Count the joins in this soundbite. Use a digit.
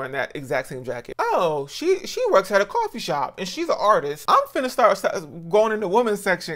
2